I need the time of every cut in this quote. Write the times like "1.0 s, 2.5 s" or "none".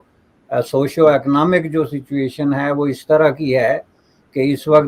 none